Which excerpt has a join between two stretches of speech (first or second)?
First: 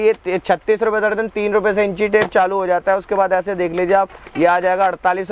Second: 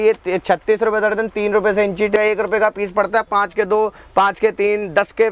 second